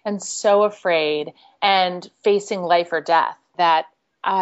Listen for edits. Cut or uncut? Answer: cut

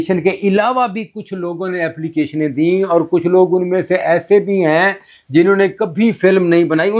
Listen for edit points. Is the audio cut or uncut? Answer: uncut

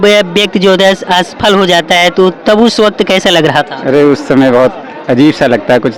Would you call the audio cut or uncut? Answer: uncut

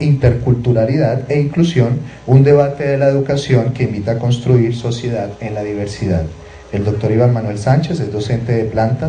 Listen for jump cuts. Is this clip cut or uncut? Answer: cut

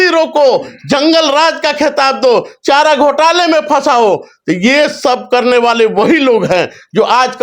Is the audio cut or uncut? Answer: uncut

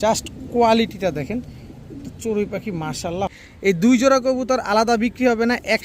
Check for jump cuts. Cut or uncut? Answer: cut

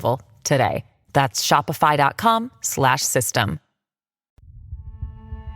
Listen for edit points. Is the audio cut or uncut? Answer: cut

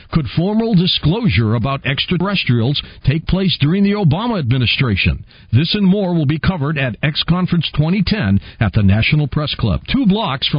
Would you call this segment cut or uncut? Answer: cut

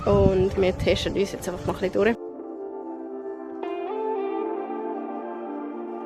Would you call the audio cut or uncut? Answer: uncut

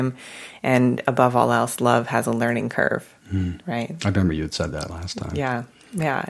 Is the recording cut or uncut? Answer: uncut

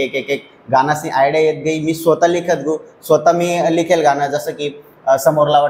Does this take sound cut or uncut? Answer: uncut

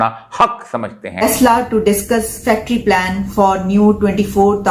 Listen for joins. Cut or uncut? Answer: cut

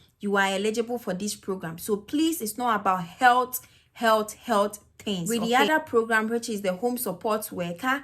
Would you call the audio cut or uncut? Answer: cut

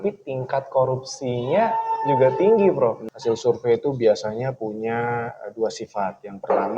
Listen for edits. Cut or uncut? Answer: cut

